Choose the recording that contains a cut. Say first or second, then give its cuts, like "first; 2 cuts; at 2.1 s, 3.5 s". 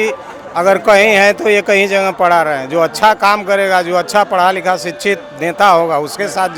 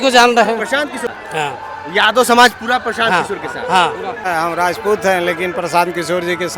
second; 2 cuts; at 1.1 s, 4.2 s